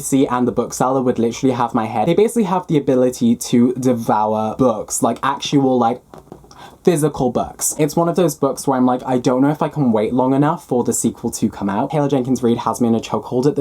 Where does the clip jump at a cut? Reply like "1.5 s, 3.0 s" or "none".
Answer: 2.0 s, 7.8 s, 11.9 s